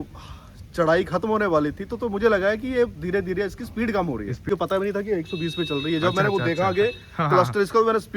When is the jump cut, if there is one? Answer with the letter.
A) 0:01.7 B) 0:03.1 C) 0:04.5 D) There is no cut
C